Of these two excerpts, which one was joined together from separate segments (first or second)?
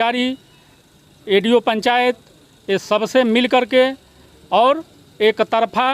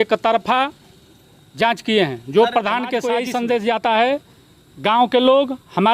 second